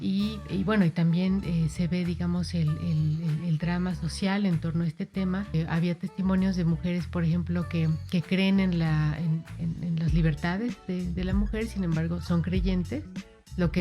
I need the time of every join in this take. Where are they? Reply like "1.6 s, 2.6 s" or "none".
5.5 s

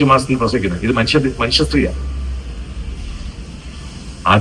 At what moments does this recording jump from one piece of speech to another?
none

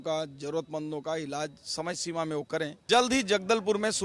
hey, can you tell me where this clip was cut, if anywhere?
2.8 s

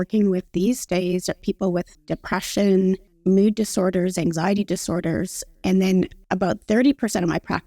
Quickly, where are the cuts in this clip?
2.0 s, 3.1 s, 6.2 s

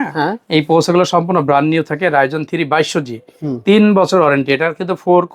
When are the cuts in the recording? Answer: none

